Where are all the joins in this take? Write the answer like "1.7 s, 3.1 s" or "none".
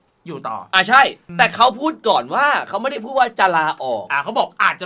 1.2 s